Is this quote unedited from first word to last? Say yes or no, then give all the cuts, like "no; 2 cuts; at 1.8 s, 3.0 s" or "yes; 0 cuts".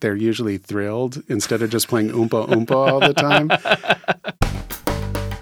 no; 1 cut; at 4.4 s